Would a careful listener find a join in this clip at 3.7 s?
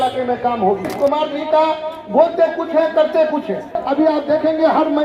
yes; 2 cuts; at 0.9 s, 3.7 s

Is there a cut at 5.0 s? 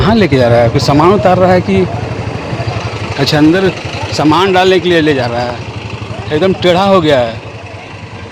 no; 0 cuts

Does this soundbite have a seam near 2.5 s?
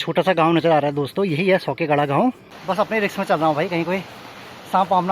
yes; 1 cut; at 2.5 s

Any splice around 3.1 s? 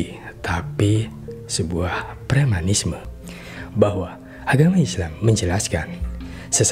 yes; 1 cut; at 3.1 s

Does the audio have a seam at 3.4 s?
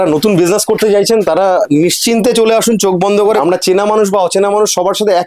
yes; 1 cut; at 3.4 s

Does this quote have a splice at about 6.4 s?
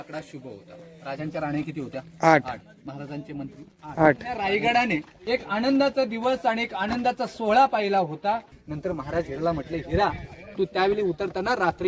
no; 3 cuts; at 4.4 s, 5.1 s, 8.6 s

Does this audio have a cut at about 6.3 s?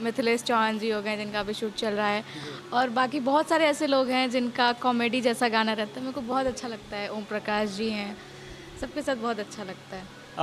no; 0 cuts

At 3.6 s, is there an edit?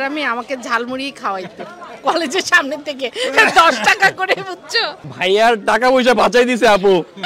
no; 0 cuts

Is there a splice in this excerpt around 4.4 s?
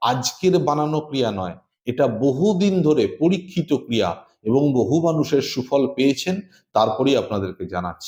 no; 0 cuts

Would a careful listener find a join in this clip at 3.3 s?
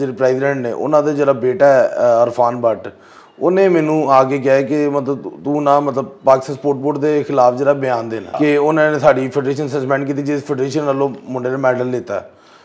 no; 1 cut; at 8.4 s

